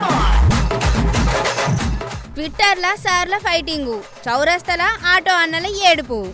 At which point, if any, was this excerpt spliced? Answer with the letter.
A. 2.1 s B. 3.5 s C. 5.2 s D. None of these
A